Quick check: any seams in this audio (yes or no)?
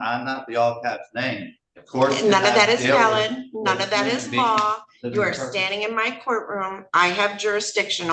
no